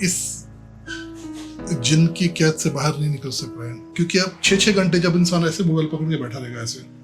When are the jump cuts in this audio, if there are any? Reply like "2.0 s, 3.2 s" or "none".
3.9 s